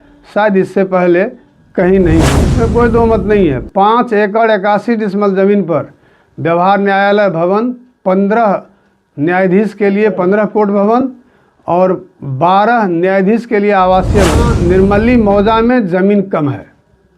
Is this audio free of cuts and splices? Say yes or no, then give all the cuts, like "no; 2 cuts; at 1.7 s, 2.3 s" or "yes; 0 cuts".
no; 2 cuts; at 2.4 s, 14.5 s